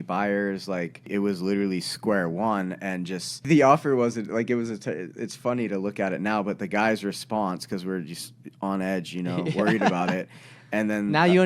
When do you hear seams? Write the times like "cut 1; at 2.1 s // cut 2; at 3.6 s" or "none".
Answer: cut 1; at 1.1 s // cut 2; at 3.5 s